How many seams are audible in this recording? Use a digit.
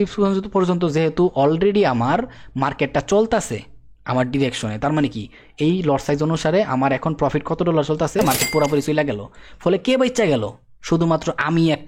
1